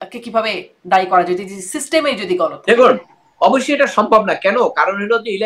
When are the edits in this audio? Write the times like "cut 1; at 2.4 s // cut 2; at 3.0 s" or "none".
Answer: none